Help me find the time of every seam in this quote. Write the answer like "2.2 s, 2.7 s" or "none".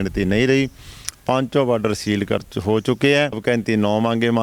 3.4 s